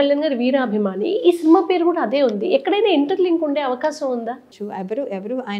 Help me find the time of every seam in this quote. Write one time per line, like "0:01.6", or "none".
0:04.5